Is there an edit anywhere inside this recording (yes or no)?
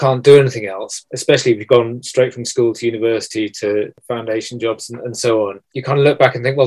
yes